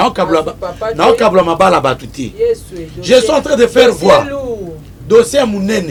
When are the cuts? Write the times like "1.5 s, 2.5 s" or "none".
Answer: none

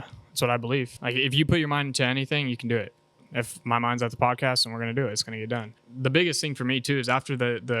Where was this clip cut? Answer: 0.9 s, 3.5 s, 5.8 s

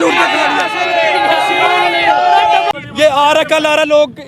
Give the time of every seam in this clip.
2.7 s

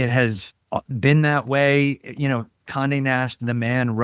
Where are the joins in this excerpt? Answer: none

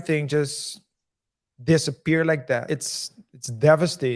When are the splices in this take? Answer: 2.7 s

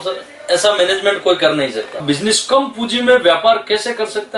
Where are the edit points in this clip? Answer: 2.0 s

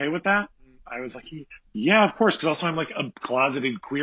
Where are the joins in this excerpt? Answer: 3.1 s

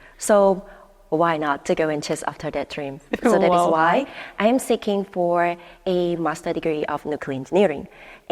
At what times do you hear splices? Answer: none

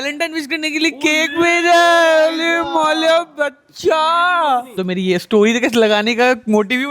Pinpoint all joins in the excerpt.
4.7 s

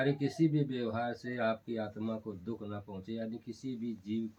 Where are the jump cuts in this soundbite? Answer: none

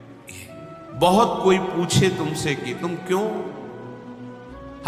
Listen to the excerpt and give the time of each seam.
1.0 s

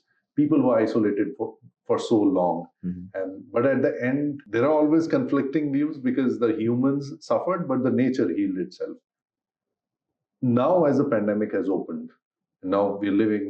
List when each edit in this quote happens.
4.4 s

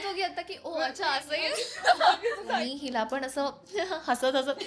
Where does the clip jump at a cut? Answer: 2.4 s

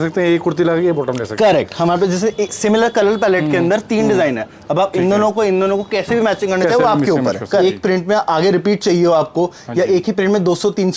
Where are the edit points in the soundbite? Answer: 7.6 s

